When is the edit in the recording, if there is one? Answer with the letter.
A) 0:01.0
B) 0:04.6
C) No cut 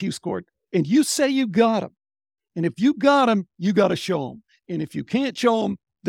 C